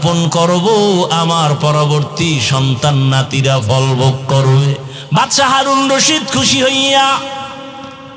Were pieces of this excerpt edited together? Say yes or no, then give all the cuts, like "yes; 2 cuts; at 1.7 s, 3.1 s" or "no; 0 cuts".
yes; 1 cut; at 4.9 s